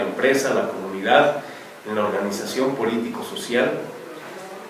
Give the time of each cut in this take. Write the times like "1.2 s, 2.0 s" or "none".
none